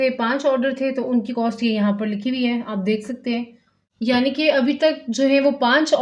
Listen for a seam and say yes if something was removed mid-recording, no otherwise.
no